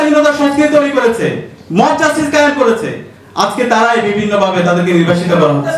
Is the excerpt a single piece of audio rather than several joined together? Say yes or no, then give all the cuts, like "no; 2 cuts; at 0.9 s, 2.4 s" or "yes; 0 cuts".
yes; 0 cuts